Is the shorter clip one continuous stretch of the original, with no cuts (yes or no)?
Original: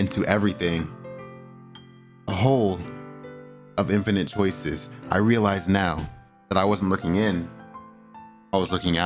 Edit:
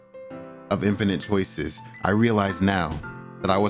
yes